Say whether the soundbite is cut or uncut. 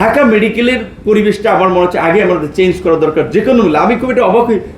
uncut